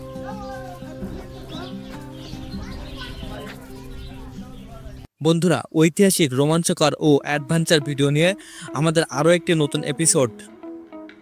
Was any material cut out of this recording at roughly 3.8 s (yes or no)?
no